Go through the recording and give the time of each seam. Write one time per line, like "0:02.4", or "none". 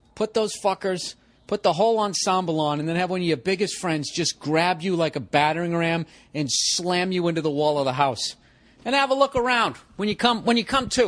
none